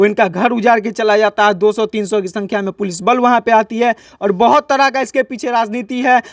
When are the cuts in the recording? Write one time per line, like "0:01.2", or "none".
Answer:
none